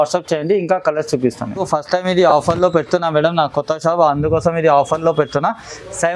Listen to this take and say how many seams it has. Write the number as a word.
one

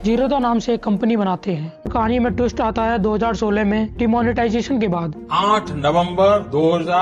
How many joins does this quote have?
one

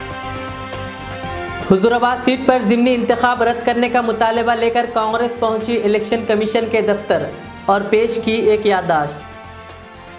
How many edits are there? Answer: one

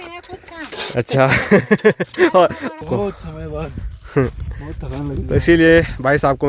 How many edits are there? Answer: one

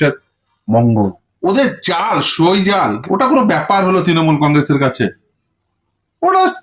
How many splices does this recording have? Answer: one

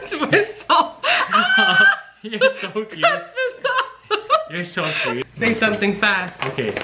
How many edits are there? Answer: one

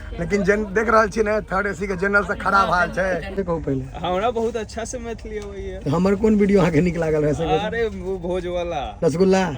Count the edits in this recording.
one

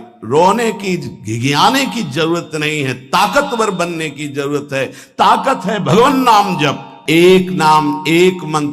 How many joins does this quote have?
one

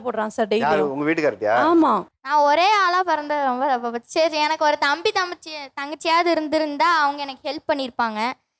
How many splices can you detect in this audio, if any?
one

